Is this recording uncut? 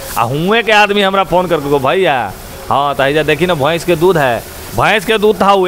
yes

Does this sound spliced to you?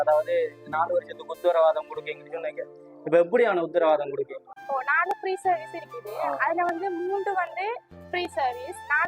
yes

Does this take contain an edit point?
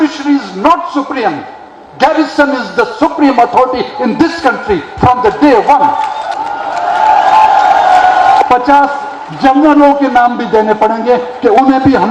yes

